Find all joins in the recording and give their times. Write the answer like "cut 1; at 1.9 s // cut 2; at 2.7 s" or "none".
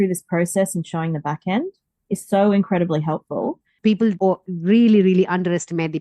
cut 1; at 4.0 s